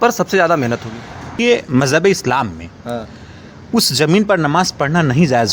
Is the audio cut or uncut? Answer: cut